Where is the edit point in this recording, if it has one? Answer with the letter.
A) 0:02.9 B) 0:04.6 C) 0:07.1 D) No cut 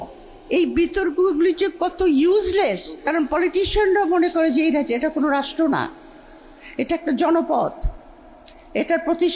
A